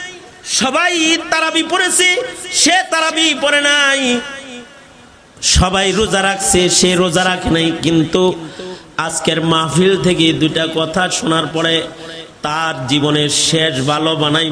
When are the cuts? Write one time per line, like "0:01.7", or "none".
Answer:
none